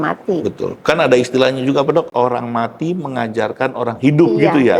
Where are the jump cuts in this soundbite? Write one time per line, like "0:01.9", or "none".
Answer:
0:02.1